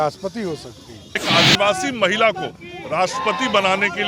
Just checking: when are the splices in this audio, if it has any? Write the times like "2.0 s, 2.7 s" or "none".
1.2 s